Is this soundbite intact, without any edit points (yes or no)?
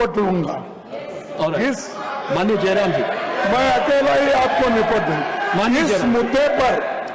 yes